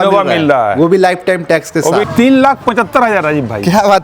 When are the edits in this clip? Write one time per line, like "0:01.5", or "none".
0:02.0

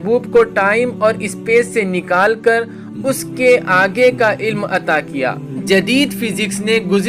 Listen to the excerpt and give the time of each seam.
0:05.6

